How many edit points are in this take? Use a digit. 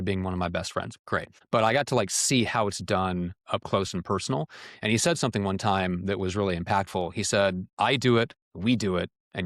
3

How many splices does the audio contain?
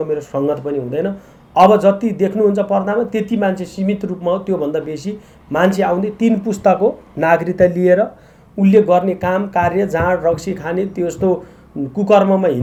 0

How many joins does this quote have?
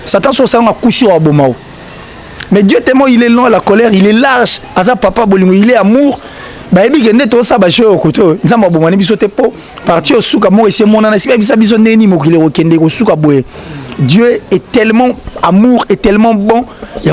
0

